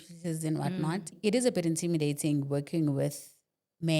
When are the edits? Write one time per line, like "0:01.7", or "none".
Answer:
0:01.1